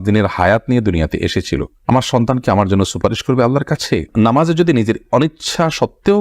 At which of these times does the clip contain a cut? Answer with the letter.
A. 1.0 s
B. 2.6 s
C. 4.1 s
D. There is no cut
C